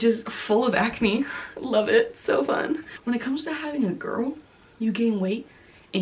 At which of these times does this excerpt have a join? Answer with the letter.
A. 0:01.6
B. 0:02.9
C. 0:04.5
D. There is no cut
B